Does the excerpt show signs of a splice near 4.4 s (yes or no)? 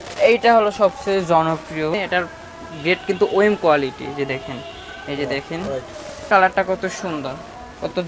no